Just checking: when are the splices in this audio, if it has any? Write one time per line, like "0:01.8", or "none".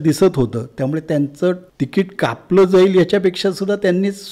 0:01.7